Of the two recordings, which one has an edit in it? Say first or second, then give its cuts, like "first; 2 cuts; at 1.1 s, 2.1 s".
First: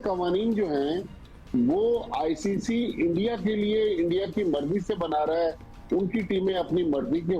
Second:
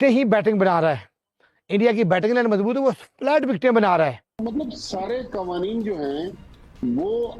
second; 1 cut; at 4.4 s